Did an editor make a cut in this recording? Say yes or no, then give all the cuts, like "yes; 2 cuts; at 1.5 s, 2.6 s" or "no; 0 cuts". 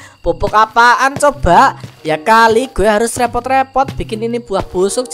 no; 0 cuts